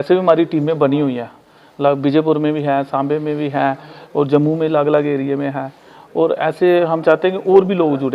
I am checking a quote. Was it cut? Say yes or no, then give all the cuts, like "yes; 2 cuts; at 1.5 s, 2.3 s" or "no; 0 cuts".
no; 0 cuts